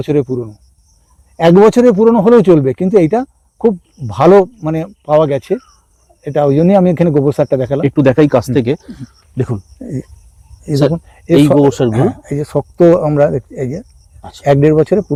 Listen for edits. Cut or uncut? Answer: uncut